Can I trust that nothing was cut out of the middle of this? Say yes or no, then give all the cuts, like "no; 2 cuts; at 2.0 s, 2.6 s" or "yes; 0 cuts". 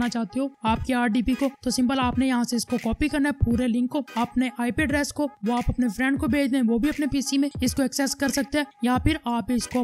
yes; 0 cuts